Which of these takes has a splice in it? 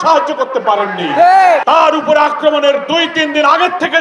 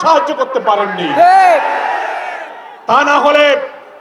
first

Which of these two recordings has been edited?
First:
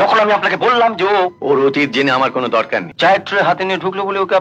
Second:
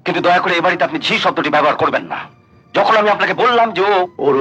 first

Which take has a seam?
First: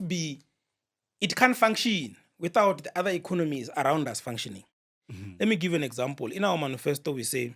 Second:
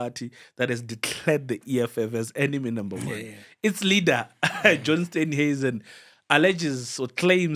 first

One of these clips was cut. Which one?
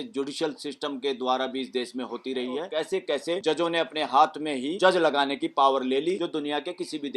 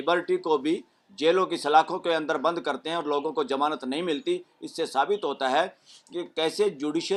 first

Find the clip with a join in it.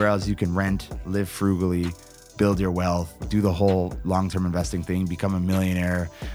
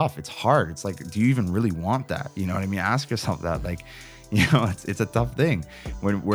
first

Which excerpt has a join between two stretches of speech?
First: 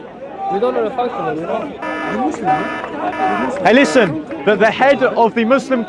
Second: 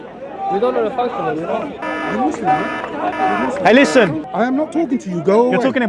second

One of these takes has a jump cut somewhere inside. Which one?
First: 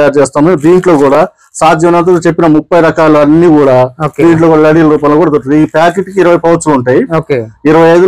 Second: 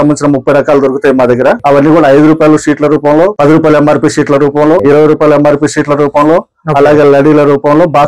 second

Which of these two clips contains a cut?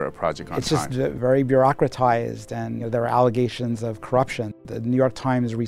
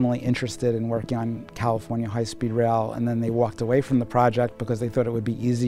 first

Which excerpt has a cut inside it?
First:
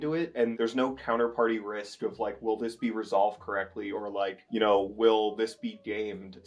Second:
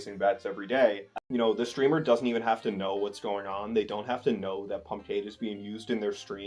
second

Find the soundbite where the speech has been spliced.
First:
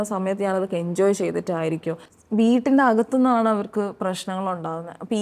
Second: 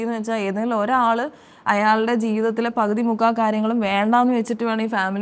first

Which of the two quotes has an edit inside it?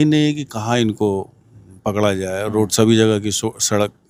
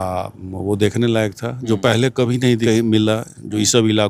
second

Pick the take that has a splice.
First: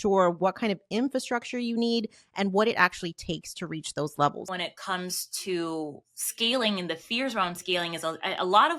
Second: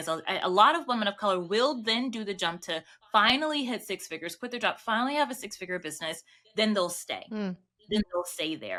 first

